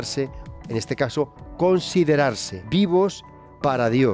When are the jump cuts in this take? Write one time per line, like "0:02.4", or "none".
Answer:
0:02.5